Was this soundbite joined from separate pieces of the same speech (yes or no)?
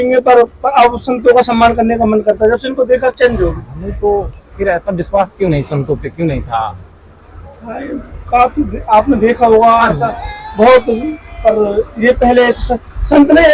no